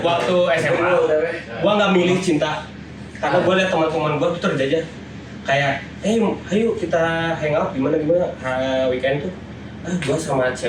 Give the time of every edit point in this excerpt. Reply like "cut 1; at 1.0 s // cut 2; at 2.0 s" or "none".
none